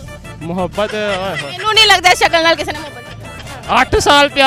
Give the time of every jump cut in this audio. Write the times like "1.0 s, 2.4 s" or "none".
none